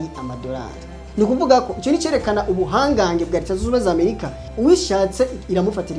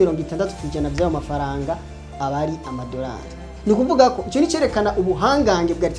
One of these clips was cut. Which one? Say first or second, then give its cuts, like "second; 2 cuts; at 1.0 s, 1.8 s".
first; 1 cut; at 4.4 s